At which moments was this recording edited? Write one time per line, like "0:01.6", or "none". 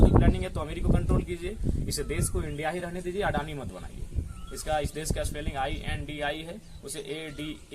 none

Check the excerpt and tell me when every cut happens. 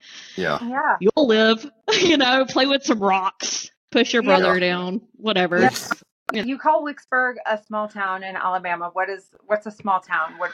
0:06.3

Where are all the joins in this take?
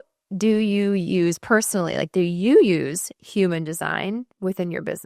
none

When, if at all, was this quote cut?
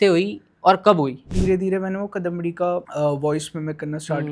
0:01.3
0:02.9

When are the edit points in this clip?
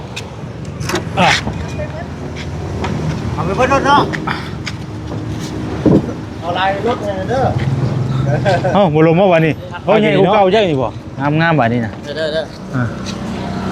0:11.1

